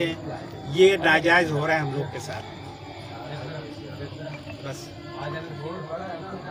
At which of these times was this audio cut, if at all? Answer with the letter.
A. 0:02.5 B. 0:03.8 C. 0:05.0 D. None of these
D